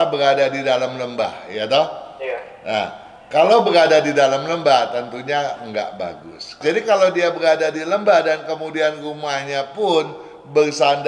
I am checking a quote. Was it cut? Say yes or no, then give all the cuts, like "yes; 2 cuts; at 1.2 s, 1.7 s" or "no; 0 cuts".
yes; 1 cut; at 6.5 s